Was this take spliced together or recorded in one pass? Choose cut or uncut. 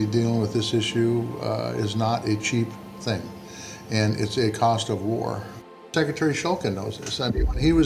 cut